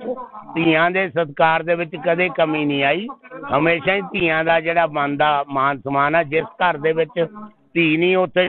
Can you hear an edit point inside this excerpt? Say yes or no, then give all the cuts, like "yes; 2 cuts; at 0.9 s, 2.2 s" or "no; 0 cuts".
no; 0 cuts